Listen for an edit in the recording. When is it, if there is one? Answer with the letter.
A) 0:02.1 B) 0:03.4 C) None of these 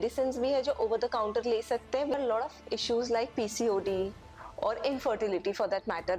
A